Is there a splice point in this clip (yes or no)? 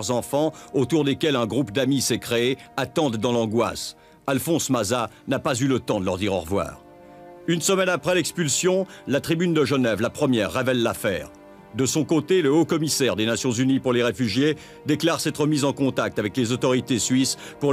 no